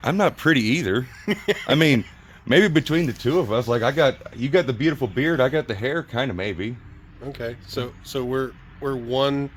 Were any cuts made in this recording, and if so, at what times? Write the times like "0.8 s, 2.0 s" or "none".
none